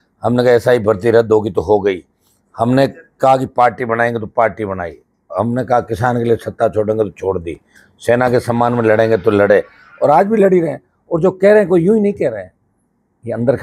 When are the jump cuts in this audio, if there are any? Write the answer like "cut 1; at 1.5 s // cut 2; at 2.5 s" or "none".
none